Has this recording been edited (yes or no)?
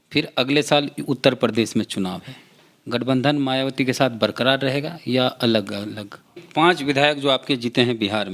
yes